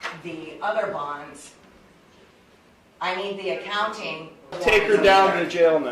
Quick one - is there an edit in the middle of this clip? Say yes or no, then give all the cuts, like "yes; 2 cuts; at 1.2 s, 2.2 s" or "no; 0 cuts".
yes; 2 cuts; at 2.7 s, 4.5 s